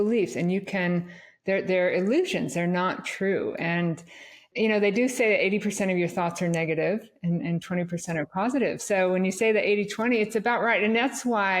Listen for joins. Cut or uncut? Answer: cut